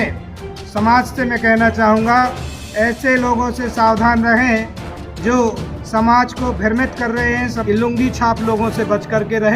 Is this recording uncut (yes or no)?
no